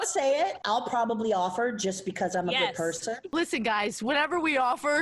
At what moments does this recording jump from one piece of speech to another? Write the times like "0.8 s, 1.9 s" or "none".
3.2 s

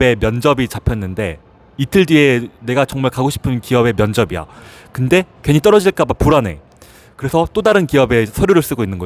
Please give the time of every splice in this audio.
none

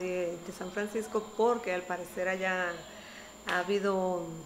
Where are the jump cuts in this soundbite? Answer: none

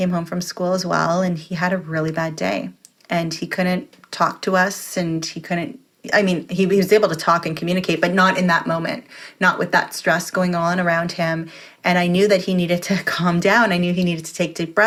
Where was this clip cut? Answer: none

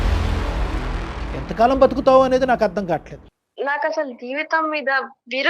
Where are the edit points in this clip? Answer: 1.2 s, 3.2 s

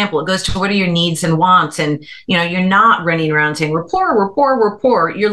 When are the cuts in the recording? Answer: none

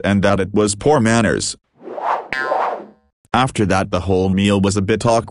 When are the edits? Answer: 1.5 s, 3.1 s

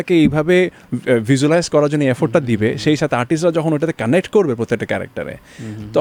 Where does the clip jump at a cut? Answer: none

